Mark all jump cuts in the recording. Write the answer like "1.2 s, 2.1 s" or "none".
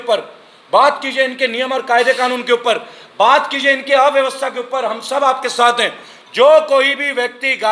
none